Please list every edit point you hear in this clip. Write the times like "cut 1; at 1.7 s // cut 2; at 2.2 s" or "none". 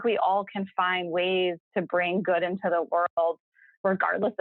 none